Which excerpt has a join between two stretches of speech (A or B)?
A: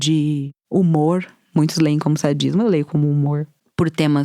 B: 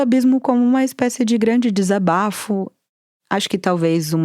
B